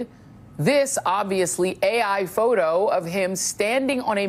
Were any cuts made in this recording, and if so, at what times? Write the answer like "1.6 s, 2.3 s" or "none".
none